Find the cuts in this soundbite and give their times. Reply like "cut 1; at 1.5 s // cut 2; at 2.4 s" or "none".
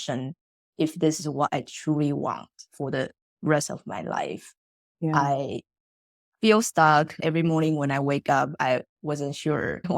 cut 1; at 7.2 s